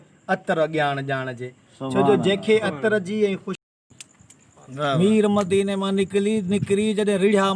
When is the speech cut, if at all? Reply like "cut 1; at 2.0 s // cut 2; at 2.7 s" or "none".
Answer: cut 1; at 3.7 s